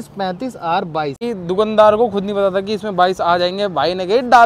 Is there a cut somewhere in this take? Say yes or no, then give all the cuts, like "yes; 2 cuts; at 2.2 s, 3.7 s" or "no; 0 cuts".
yes; 1 cut; at 1.2 s